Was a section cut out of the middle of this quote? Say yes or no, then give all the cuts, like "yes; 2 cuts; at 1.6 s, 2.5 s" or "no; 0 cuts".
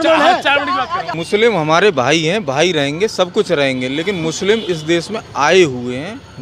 yes; 1 cut; at 1.1 s